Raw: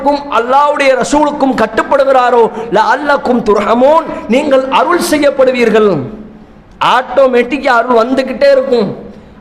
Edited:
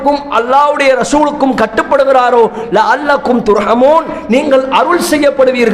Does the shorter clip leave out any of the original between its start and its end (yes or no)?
no